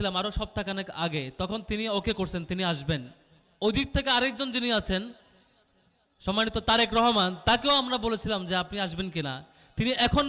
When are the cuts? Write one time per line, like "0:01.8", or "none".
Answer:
none